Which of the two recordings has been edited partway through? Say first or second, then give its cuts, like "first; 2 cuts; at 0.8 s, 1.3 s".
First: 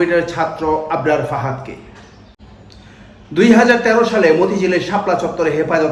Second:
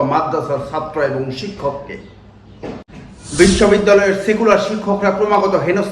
second; 1 cut; at 2.9 s